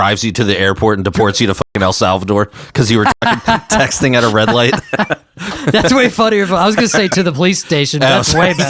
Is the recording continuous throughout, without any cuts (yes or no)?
yes